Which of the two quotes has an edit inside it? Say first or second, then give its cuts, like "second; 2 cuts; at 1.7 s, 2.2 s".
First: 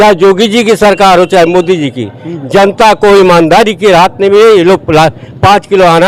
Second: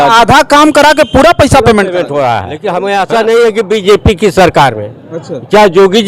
second; 1 cut; at 2.6 s